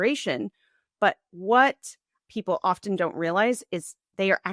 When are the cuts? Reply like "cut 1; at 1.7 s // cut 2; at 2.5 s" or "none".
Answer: none